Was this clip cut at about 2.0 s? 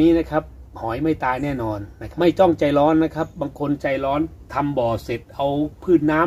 yes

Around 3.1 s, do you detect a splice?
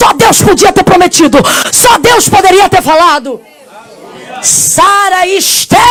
no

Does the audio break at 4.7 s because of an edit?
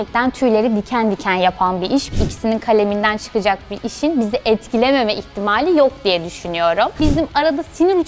no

